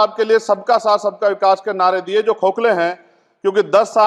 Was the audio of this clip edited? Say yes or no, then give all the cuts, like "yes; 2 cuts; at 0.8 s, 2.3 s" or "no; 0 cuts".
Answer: no; 0 cuts